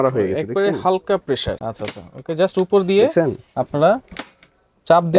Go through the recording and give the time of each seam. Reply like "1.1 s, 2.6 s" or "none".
1.5 s